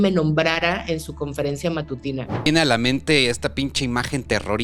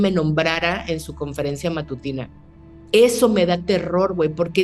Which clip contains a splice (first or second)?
first